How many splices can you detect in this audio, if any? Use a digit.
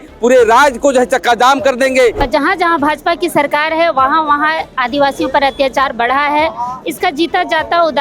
1